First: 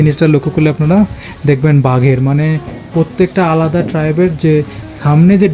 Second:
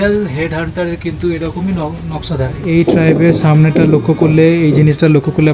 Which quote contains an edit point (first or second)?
second